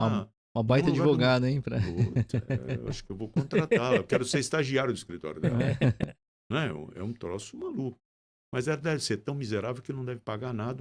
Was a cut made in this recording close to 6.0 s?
yes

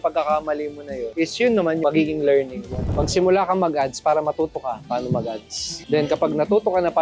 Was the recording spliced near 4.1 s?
no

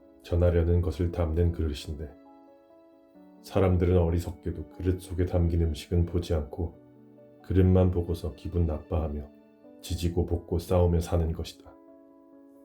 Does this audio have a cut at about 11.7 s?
yes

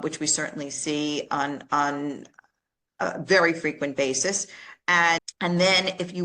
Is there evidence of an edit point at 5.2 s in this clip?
yes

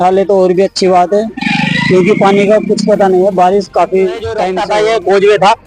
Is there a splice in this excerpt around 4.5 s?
yes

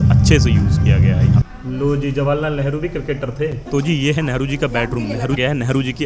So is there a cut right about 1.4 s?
yes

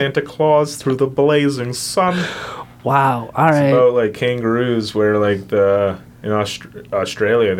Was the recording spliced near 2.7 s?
no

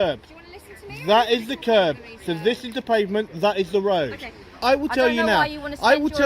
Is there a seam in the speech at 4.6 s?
yes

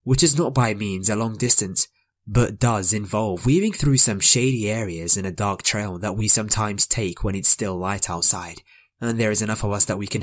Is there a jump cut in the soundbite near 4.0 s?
yes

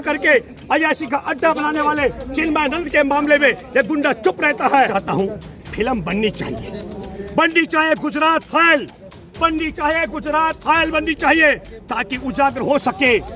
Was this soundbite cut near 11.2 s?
no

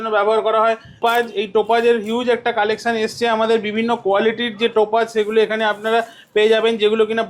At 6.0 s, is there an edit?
no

